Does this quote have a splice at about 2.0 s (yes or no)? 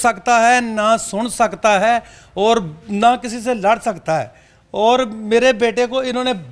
no